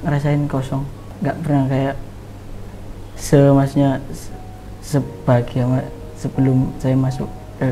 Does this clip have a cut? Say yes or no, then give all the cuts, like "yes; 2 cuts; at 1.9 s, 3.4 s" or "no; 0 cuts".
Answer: yes; 1 cut; at 1.0 s